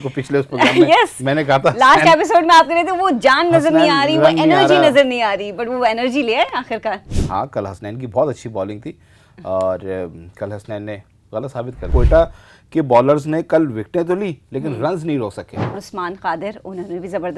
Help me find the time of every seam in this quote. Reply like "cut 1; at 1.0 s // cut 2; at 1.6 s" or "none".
cut 1; at 11.9 s // cut 2; at 15.8 s